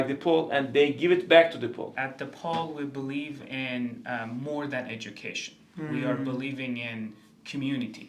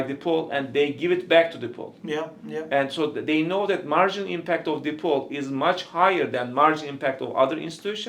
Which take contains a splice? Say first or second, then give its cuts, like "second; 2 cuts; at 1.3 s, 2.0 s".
first; 1 cut; at 1.9 s